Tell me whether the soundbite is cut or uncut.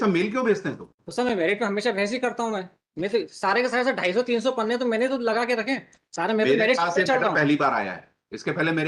cut